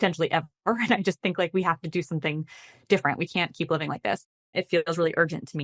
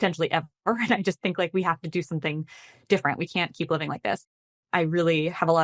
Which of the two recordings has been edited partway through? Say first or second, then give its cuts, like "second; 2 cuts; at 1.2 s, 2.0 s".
second; 1 cut; at 4.4 s